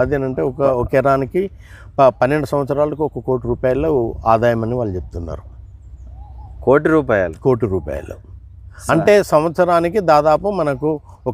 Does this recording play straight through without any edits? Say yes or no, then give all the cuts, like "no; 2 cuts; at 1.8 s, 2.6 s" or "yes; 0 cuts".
yes; 0 cuts